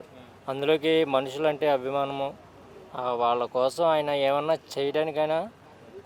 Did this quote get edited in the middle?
no; 0 cuts

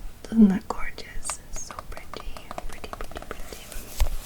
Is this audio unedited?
yes; 0 cuts

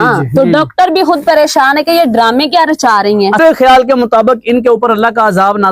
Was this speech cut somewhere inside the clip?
yes; 1 cut; at 3.4 s

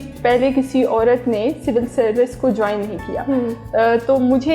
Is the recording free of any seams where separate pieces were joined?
yes; 0 cuts

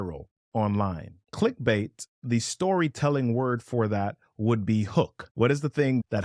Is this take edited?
yes; 1 cut; at 1.2 s

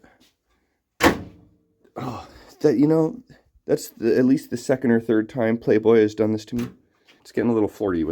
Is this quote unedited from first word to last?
no; 1 cut; at 7.2 s

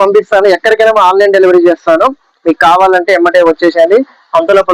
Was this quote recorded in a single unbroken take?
yes; 0 cuts

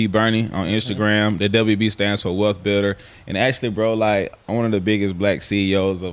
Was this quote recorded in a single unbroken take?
yes; 0 cuts

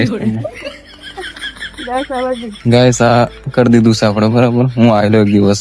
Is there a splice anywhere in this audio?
no; 0 cuts

